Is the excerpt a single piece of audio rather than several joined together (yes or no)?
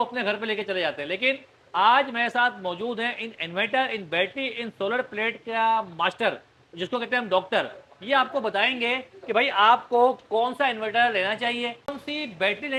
yes